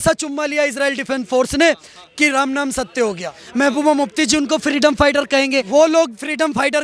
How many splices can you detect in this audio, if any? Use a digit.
2